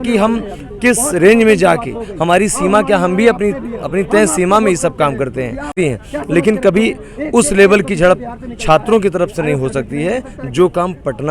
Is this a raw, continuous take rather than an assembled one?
no; 1 cut; at 5.7 s

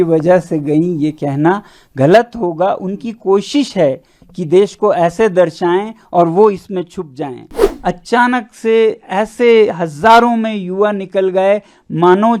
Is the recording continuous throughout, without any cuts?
no; 1 cut; at 7.6 s

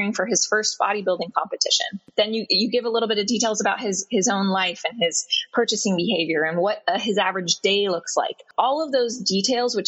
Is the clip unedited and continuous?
no; 2 cuts; at 2.1 s, 8.4 s

